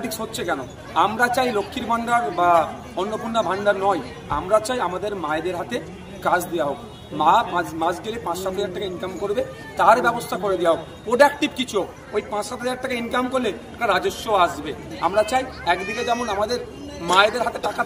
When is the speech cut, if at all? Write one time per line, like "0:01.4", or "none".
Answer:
none